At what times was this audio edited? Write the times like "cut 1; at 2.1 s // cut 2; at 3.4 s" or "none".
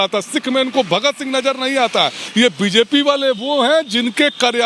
cut 1; at 2.2 s